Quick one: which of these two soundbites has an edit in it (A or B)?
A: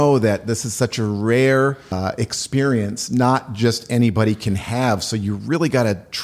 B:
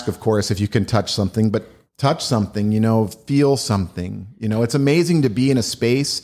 A